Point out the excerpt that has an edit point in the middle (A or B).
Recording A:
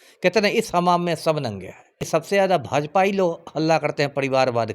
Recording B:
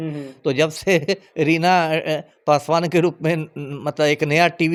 A